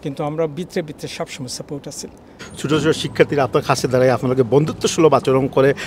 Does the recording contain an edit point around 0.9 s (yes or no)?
no